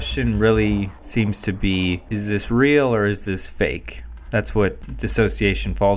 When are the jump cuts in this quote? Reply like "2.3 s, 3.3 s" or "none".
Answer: 1.0 s, 2.0 s, 4.9 s